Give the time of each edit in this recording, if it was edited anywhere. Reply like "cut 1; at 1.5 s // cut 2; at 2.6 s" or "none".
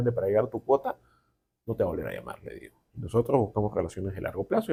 none